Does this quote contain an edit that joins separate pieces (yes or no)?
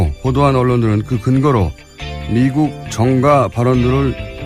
no